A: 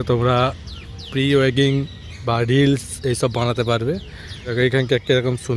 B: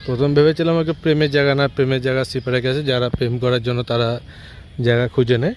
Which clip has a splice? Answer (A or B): A